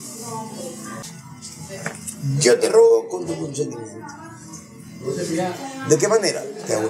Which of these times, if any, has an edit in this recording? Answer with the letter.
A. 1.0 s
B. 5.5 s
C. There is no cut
A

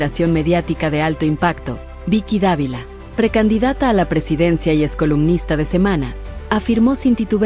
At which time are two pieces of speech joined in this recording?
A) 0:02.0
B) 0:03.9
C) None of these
C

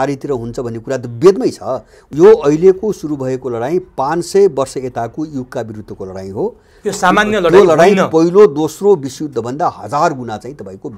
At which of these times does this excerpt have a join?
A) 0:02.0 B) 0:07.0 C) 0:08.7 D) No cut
A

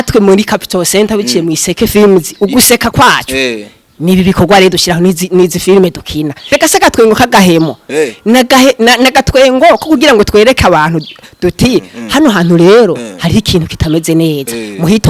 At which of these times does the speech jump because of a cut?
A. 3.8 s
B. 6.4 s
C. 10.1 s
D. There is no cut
B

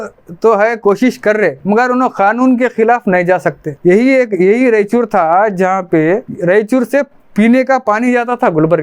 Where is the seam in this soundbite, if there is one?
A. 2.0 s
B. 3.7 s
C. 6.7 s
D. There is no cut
B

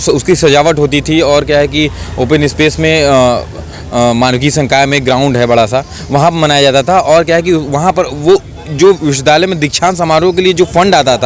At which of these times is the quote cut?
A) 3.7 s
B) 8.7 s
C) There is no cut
C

